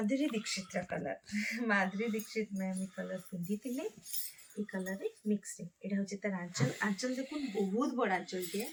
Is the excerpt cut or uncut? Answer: uncut